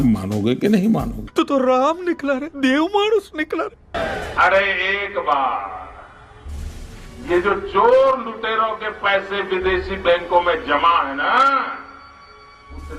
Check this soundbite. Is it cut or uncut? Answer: uncut